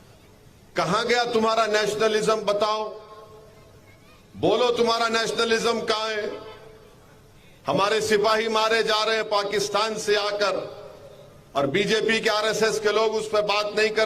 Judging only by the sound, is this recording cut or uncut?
uncut